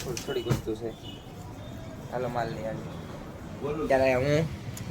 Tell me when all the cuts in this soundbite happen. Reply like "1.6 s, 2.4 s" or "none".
3.9 s